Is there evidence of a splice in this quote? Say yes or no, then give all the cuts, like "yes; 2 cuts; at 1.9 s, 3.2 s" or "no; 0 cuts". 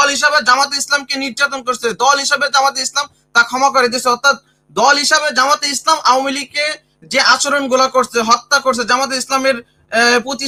no; 0 cuts